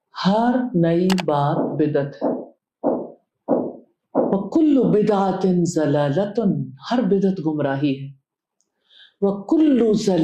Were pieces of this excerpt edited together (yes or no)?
no